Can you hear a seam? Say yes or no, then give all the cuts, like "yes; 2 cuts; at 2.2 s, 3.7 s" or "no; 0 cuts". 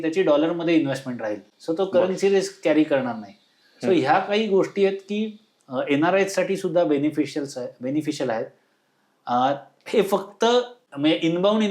no; 0 cuts